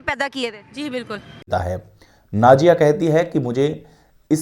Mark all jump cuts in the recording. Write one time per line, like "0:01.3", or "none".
0:01.5